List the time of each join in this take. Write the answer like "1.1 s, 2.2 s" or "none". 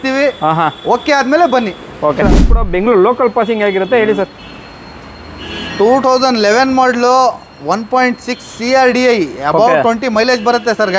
2.2 s